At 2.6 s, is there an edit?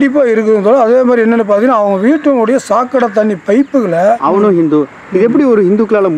no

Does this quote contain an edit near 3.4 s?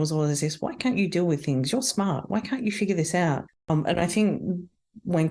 yes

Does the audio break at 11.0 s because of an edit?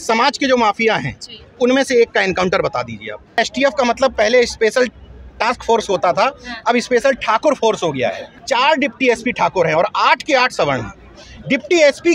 no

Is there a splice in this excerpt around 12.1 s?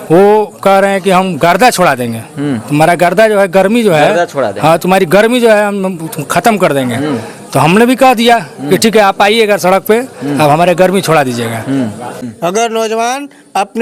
yes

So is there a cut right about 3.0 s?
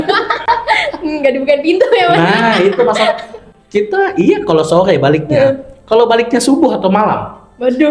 no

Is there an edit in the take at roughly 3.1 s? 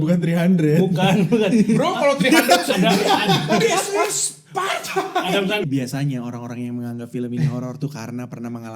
no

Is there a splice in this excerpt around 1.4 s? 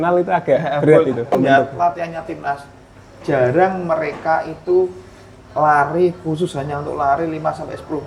yes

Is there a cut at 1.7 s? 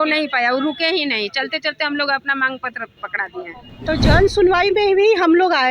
no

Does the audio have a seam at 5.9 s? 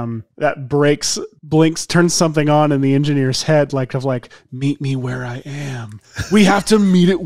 no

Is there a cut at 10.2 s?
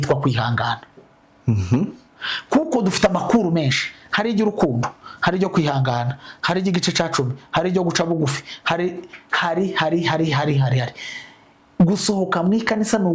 no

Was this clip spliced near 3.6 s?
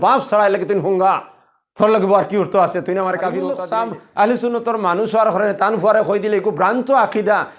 yes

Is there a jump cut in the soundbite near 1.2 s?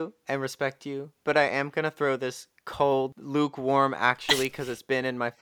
no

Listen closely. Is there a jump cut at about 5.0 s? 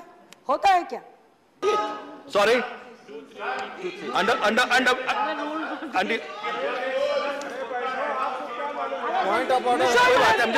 no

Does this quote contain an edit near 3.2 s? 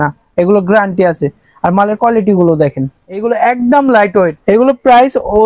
yes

